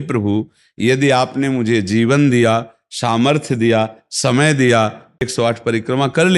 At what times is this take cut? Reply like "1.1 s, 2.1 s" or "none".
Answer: 5.3 s